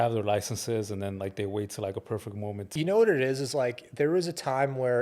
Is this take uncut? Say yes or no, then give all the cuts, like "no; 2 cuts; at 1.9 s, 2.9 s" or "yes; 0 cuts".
no; 1 cut; at 2.7 s